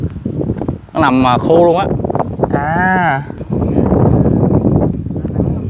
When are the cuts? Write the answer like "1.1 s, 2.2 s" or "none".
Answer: 3.4 s